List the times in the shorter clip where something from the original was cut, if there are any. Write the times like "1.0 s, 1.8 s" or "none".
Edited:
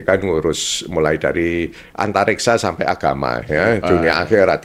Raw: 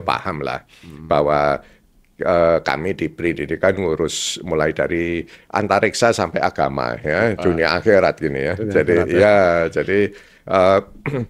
none